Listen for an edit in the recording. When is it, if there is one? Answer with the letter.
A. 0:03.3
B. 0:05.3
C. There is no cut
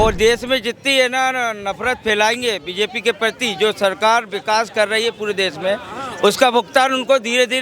C